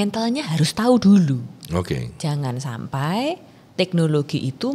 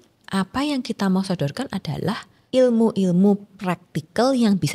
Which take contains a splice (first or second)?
second